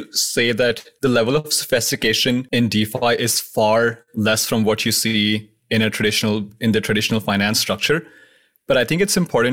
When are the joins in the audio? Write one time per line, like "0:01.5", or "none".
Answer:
0:00.9
0:02.5